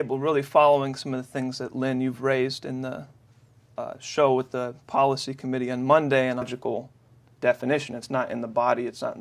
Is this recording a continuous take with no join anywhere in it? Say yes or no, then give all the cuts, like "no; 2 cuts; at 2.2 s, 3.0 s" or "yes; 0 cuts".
yes; 0 cuts